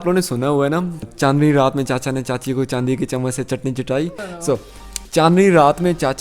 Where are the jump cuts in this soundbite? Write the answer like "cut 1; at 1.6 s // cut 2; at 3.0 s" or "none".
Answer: cut 1; at 1.0 s // cut 2; at 4.5 s